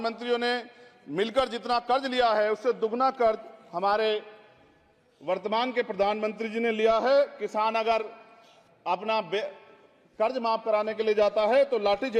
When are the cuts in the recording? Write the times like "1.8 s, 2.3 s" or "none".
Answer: none